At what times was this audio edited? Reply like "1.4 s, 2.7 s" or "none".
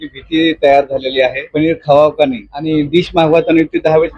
1.5 s, 2.5 s